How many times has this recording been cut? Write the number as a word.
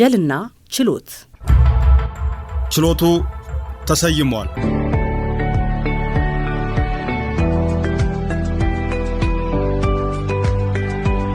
zero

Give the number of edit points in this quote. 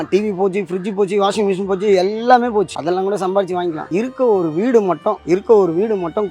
three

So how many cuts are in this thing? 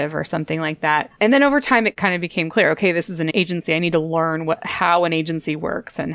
three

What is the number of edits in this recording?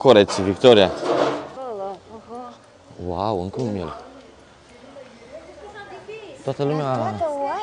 one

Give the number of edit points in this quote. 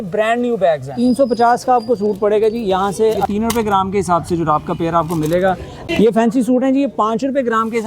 three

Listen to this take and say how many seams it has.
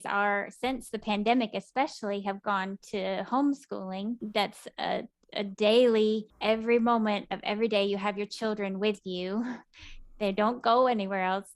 two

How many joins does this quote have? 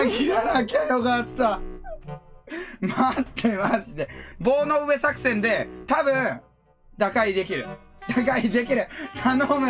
one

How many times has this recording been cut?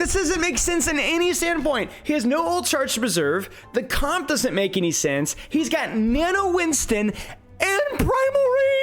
zero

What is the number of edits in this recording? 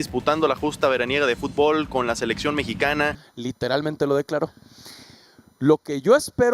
one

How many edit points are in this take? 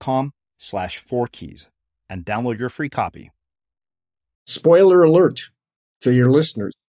one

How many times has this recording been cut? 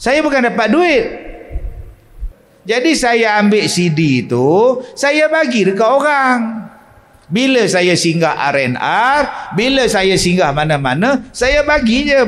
one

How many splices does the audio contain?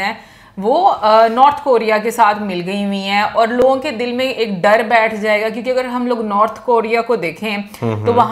zero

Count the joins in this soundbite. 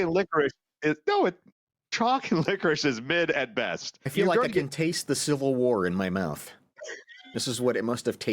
one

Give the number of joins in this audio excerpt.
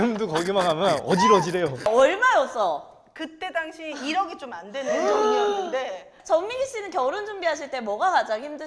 two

